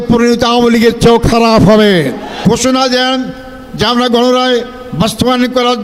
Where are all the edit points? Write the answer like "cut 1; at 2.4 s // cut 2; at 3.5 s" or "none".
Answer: cut 1; at 2.4 s